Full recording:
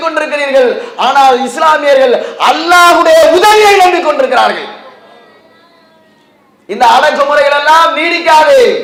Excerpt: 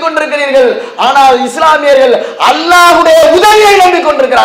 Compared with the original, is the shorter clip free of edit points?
yes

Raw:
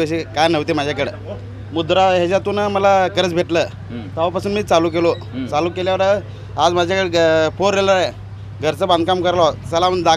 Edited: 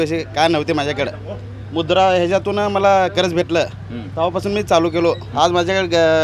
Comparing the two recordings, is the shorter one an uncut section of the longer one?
no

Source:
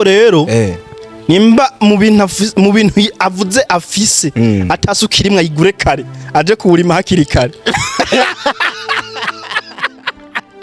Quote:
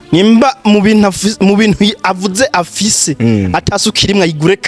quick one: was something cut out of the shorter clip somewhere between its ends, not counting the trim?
no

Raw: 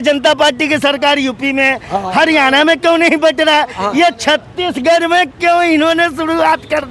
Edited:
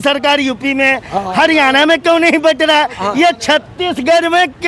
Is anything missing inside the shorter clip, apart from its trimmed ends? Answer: no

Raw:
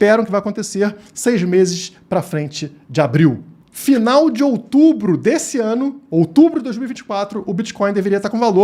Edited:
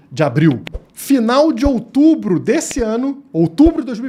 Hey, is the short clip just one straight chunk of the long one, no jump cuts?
yes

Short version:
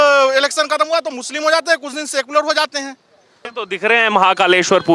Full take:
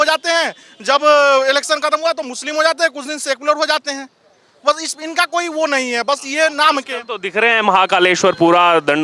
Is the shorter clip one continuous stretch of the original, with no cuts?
no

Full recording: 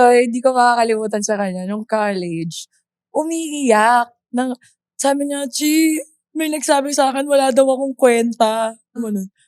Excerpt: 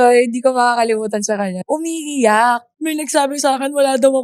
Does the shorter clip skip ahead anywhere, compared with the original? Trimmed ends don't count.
yes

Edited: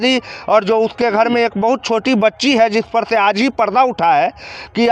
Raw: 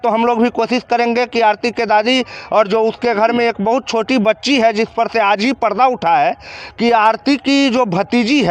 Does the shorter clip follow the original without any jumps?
yes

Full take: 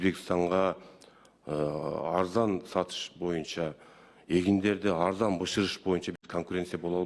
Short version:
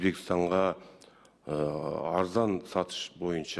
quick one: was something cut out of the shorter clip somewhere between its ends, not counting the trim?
no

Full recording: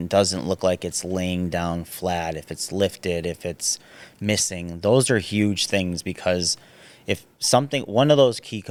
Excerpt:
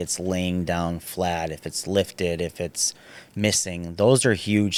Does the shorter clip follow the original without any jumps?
yes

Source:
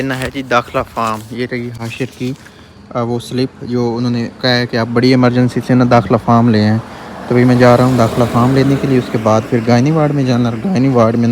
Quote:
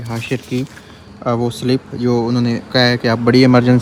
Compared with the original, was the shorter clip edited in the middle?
no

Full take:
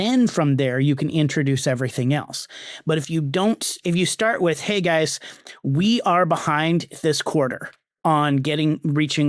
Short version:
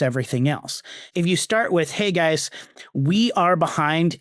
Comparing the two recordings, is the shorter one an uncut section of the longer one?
no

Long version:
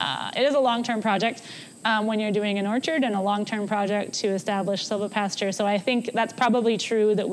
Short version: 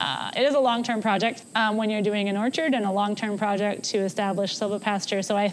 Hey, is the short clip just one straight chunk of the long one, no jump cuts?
no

